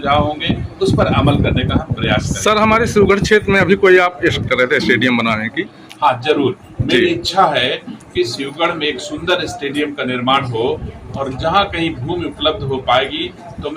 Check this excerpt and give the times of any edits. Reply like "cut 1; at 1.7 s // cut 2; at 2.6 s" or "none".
cut 1; at 4.4 s